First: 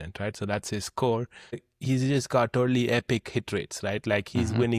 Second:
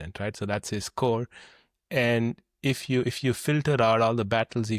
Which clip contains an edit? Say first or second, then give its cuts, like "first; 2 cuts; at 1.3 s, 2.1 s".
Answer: first; 1 cut; at 1.7 s